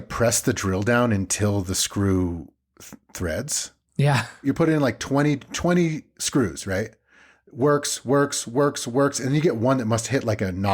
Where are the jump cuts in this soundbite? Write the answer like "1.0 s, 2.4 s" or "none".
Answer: 4.4 s